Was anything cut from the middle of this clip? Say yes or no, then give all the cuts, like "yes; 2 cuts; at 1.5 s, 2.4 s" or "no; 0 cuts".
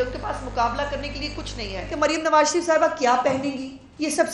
yes; 1 cut; at 1.9 s